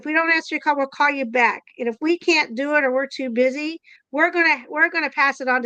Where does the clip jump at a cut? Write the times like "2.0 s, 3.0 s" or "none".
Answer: 4.0 s